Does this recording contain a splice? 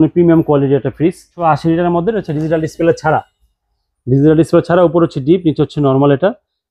yes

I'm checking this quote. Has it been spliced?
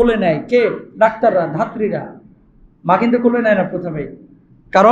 no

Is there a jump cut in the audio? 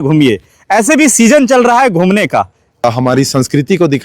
yes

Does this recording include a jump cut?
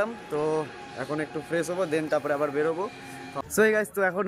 yes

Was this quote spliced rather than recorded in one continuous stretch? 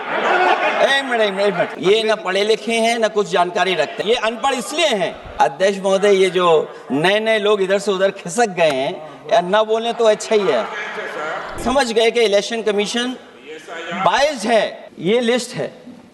yes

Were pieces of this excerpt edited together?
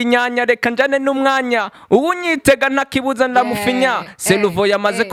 no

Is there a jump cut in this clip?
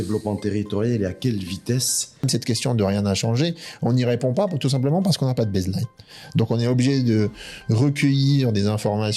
yes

